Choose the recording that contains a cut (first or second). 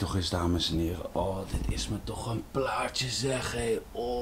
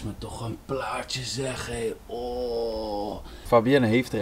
second